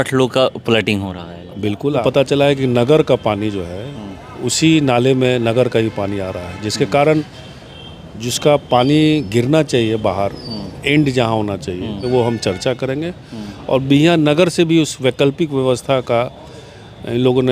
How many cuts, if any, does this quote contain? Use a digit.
2